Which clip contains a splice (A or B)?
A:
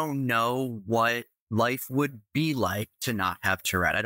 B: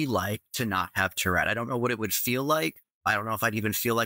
B